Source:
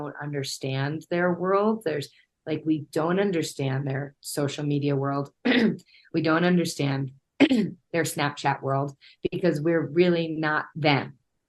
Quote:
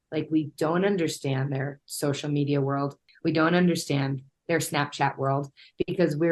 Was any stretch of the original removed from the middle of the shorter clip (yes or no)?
yes